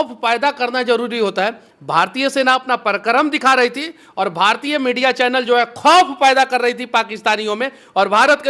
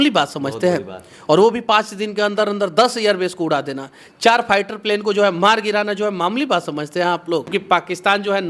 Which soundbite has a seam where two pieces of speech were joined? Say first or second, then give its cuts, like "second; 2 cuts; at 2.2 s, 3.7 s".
second; 1 cut; at 7.5 s